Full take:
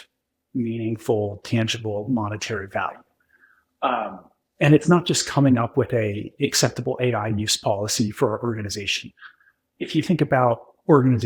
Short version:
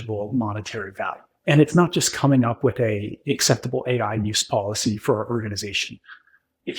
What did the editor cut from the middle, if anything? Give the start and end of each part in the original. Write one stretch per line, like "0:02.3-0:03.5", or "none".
0:03.0-0:04.4